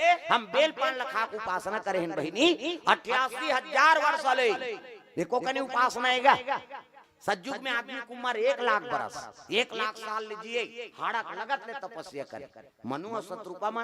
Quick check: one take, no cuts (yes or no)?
yes